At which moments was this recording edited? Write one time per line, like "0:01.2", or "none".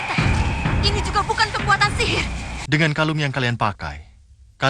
0:02.5